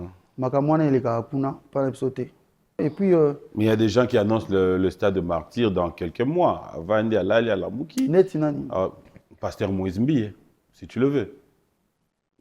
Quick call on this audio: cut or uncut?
cut